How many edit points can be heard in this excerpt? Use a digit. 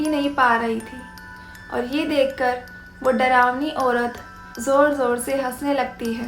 1